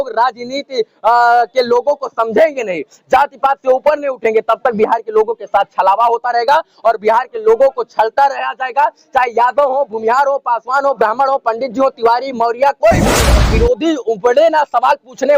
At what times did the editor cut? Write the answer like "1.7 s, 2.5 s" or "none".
13.4 s